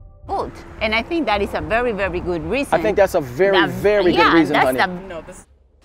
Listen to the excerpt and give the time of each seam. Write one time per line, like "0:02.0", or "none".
0:05.0